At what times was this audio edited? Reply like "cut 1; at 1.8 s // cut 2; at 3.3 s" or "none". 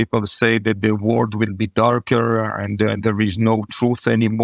none